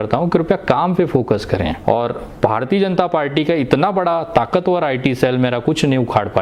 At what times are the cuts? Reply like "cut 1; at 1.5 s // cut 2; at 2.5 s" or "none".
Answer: cut 1; at 1.8 s